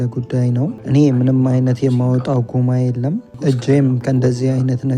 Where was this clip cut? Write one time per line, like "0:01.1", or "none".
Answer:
0:00.8
0:03.3